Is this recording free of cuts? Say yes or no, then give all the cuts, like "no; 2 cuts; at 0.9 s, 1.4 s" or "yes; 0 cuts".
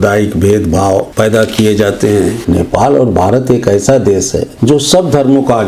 no; 3 cuts; at 1.1 s, 2.4 s, 4.5 s